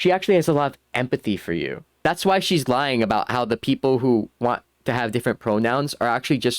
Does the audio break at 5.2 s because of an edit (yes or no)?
no